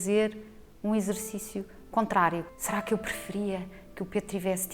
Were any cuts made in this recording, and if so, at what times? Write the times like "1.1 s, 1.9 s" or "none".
2.5 s